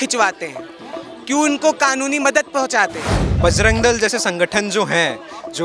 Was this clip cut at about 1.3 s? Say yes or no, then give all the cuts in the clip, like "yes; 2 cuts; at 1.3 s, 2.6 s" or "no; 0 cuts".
no; 1 cut; at 3.3 s